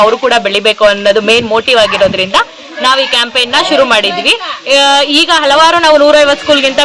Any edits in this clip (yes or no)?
no